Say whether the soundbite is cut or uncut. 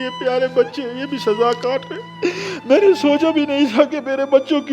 cut